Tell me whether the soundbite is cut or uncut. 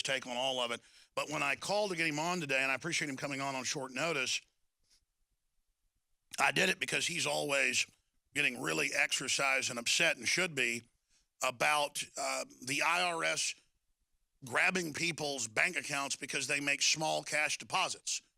uncut